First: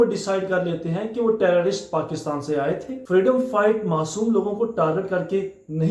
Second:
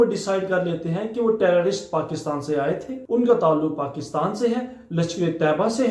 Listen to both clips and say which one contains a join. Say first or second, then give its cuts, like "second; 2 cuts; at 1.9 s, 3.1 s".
first; 1 cut; at 3.0 s